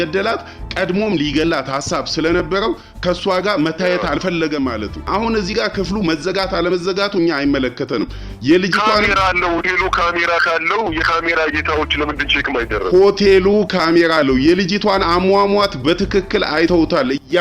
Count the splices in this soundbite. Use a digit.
1